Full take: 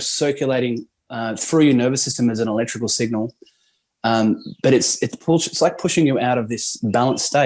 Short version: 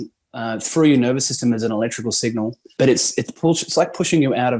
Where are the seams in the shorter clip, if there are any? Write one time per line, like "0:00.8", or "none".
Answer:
0:02.6